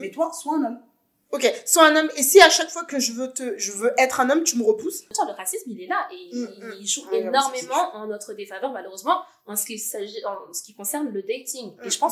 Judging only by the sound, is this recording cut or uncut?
cut